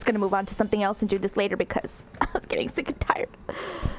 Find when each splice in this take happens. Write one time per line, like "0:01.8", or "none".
none